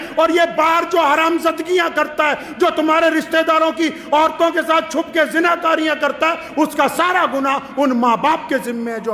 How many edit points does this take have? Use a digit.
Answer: 0